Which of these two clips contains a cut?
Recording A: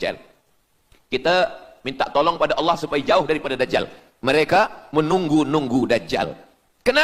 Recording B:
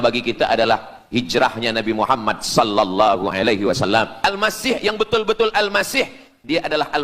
B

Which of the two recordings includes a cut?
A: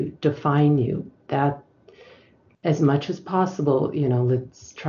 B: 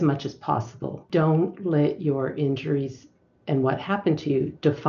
B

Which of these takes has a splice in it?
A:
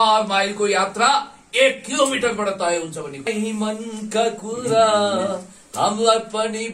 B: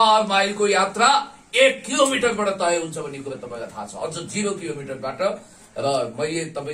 A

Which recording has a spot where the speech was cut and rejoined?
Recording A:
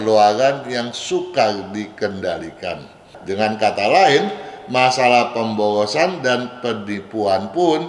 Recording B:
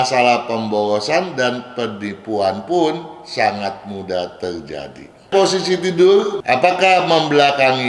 B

